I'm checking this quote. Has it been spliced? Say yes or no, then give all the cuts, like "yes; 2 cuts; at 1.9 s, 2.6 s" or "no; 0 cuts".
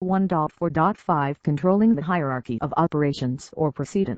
no; 0 cuts